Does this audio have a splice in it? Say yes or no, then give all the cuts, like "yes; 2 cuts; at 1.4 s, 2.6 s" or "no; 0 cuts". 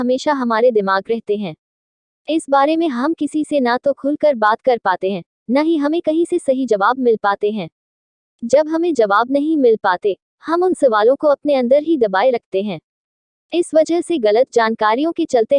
no; 0 cuts